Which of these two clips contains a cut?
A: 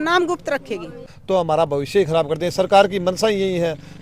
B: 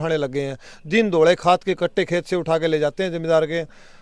A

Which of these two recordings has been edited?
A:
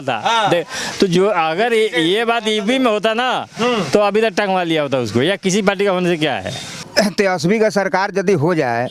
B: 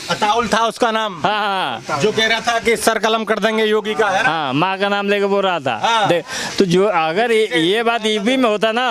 A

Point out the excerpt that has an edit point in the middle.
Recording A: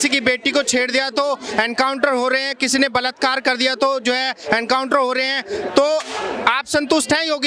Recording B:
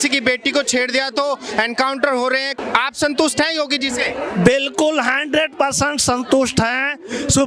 B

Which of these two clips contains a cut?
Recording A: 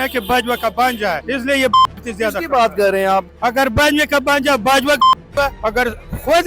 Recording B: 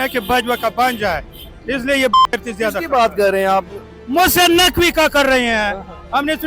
A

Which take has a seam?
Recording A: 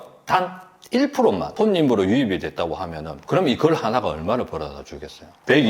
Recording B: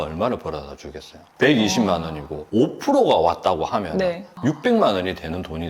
A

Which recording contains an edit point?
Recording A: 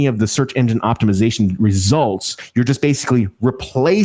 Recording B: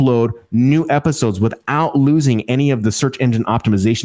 A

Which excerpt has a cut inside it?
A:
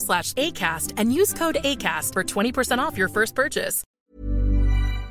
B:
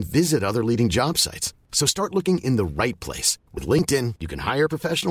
A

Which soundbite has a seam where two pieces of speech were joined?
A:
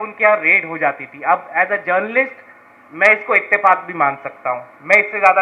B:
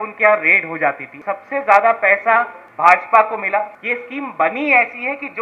B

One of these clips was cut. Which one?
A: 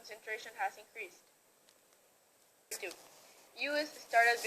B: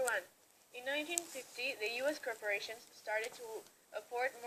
A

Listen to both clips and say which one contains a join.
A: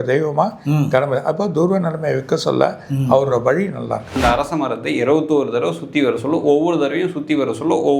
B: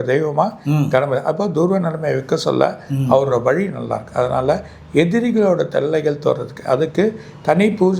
A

